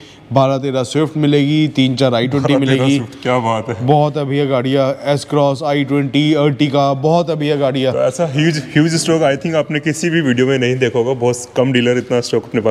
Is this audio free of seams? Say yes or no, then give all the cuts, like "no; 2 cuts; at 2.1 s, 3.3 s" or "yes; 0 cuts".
yes; 0 cuts